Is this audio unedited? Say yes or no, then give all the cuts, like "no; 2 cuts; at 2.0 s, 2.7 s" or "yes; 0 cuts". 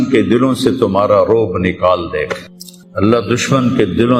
yes; 0 cuts